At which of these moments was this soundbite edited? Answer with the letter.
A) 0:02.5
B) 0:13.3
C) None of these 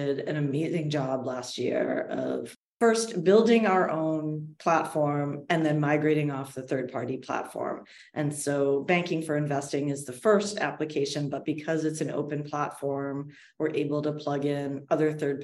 A